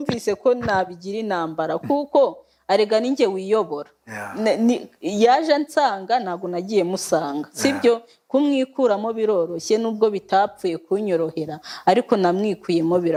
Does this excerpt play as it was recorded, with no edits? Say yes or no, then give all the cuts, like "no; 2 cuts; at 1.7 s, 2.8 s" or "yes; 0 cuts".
yes; 0 cuts